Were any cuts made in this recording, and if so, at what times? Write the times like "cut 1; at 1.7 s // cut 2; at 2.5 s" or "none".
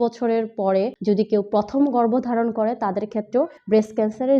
cut 1; at 0.9 s // cut 2; at 3.6 s